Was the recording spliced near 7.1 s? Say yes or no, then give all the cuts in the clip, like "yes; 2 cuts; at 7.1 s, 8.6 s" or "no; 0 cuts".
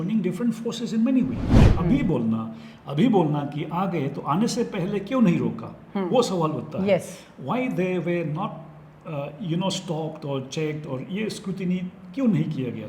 no; 1 cut; at 1.7 s